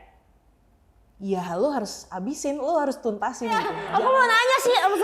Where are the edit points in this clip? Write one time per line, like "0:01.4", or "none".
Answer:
0:03.8

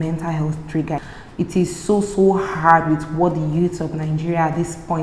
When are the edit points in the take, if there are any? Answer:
0:01.2

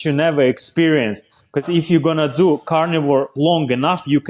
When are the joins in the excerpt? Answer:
0:01.6
0:03.3

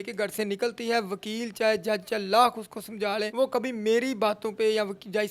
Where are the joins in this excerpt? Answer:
0:03.3

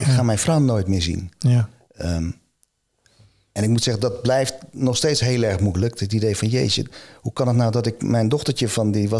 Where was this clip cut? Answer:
none

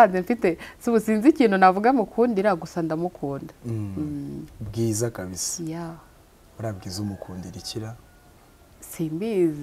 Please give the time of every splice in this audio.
none

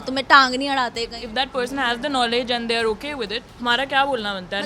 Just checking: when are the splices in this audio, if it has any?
0:01.2
0:03.4

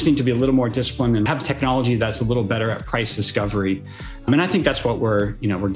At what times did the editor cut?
0:01.3
0:04.2

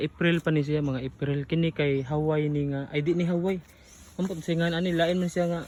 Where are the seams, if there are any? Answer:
none

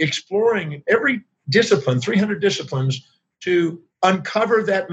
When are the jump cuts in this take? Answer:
0:01.3
0:03.8

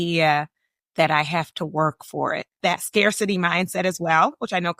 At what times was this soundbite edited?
0:02.5

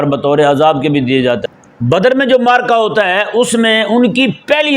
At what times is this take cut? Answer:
0:01.4

